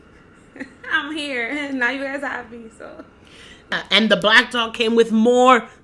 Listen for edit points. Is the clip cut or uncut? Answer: cut